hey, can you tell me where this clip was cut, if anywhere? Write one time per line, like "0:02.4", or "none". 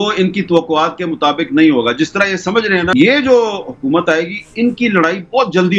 0:02.9